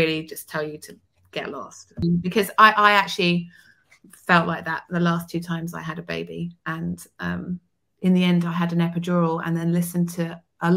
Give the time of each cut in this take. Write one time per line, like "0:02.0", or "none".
0:02.0